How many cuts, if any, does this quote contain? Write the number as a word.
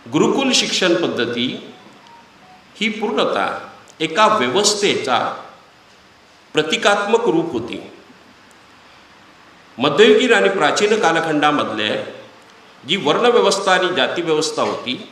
zero